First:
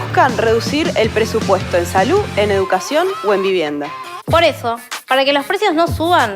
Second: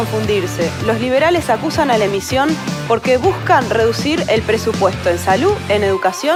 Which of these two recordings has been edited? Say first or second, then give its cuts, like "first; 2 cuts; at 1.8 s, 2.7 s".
first; 1 cut; at 4.1 s